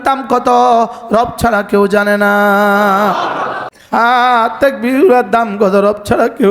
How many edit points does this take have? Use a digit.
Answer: 1